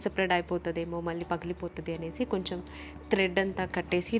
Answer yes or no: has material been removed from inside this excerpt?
no